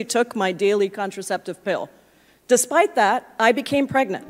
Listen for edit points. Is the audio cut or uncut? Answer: uncut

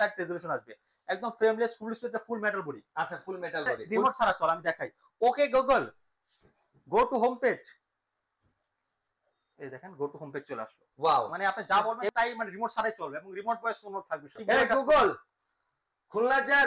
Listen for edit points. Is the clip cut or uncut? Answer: cut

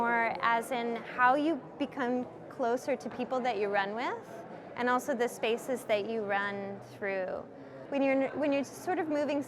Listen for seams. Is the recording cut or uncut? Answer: cut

